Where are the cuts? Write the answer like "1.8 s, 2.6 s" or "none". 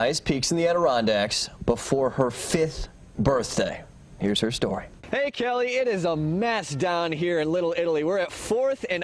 4.9 s